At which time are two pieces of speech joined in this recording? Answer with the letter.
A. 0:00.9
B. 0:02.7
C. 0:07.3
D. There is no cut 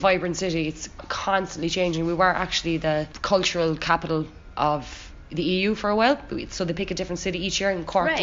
A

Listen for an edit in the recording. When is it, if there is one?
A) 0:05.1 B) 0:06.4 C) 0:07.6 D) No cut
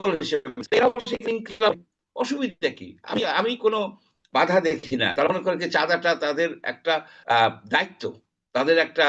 A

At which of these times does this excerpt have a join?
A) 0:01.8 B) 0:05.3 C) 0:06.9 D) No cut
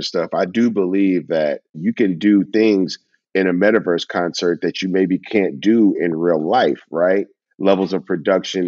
A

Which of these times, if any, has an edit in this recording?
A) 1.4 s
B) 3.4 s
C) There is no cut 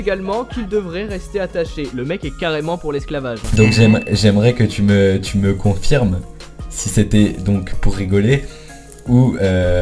B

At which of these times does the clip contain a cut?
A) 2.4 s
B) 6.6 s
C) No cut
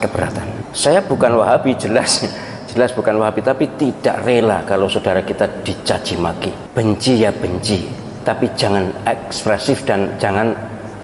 B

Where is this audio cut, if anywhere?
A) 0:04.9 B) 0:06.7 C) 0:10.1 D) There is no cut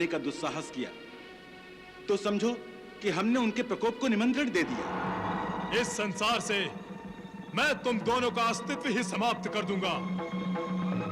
A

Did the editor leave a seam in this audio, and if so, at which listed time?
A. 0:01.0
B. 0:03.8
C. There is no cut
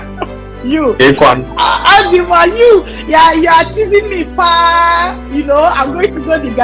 C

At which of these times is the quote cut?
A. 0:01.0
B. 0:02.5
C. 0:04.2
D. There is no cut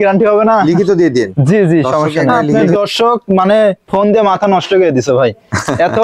B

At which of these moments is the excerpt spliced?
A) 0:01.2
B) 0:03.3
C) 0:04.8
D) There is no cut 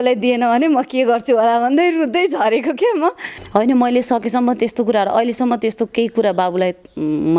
B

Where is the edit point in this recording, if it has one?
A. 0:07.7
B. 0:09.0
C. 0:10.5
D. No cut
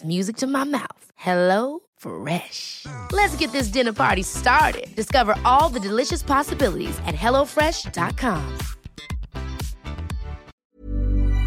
C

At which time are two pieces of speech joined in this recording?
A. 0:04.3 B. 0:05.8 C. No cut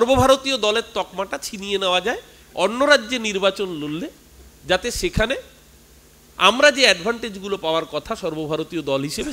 C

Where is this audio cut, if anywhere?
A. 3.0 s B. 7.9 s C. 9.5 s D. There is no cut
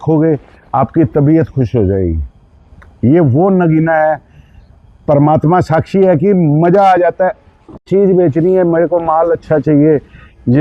B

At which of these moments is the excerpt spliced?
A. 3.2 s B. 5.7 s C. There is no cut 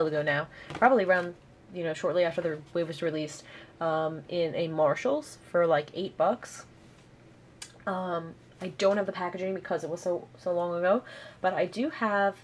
C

